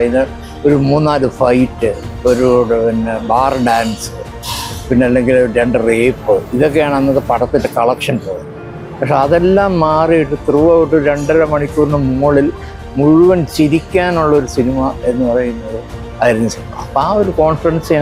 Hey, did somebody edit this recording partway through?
no; 0 cuts

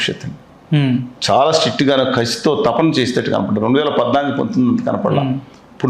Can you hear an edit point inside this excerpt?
no; 0 cuts

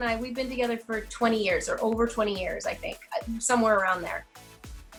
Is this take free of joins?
yes; 0 cuts

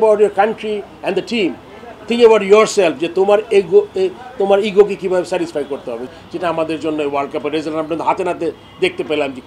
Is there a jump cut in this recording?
yes; 1 cut; at 6.0 s

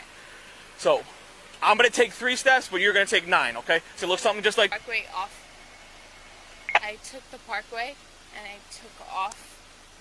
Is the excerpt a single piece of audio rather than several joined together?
no; 1 cut; at 4.7 s

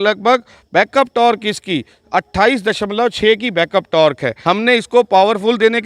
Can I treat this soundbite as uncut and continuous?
no; 1 cut; at 4.3 s

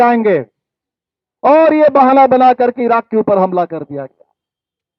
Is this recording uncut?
yes; 0 cuts

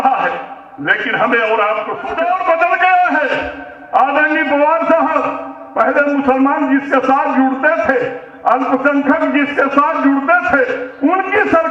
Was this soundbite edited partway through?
yes; 1 cut; at 2.1 s

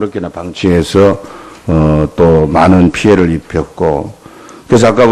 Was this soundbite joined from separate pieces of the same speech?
yes; 1 cut; at 4.1 s

